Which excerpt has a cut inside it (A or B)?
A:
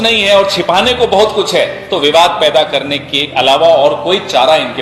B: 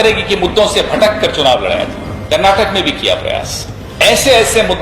B